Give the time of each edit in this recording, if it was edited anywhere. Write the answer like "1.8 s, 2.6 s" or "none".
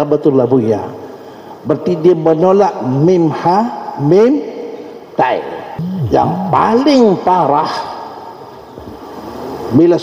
5.7 s